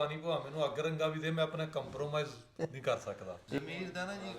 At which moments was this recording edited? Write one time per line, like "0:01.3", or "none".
0:03.4